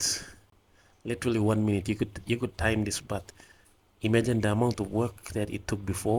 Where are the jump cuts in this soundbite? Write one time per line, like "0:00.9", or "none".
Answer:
none

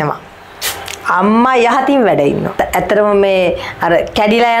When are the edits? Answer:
0:02.5

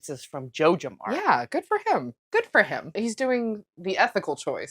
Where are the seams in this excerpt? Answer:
0:02.2
0:03.0

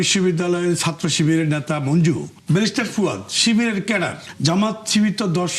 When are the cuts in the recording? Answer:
0:02.3
0:04.3

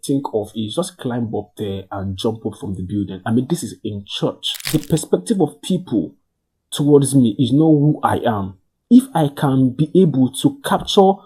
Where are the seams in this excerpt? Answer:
0:04.6

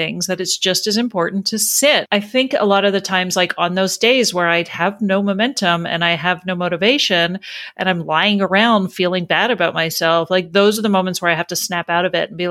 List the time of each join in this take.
0:02.1

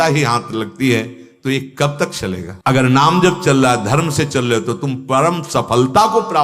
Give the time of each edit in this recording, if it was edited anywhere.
0:02.5

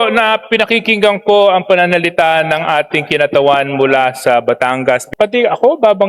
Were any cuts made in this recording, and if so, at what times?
0:05.1

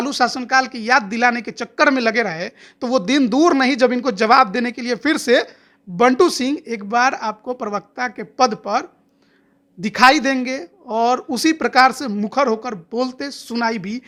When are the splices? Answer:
none

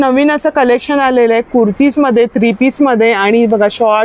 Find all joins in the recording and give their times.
none

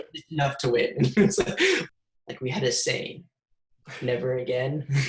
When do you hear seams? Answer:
0:01.8

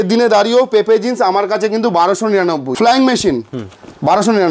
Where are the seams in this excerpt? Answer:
0:02.7

